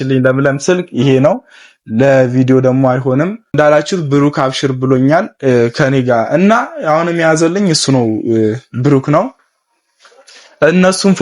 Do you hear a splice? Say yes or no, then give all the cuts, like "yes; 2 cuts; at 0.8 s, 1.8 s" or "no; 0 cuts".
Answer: yes; 1 cut; at 3.5 s